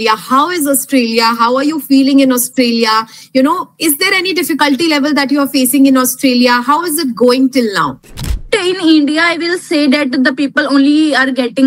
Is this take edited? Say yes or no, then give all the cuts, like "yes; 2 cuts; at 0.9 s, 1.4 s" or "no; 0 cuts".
yes; 1 cut; at 8.4 s